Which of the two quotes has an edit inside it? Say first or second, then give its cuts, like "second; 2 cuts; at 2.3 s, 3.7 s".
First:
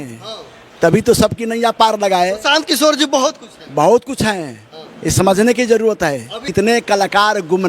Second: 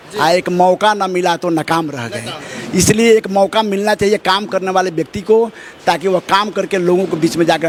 first; 1 cut; at 6.4 s